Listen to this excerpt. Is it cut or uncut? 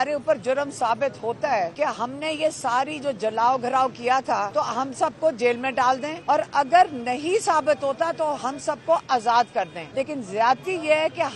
cut